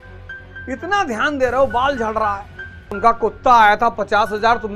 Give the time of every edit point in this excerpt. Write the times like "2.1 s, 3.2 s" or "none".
2.9 s